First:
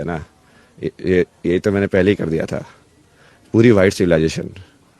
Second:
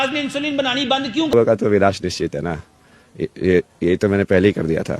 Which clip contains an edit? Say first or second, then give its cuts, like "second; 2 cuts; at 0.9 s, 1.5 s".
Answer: second; 1 cut; at 1.3 s